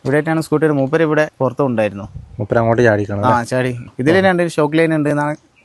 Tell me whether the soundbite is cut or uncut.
cut